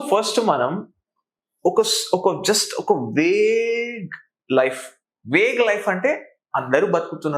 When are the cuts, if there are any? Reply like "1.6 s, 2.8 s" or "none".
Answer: none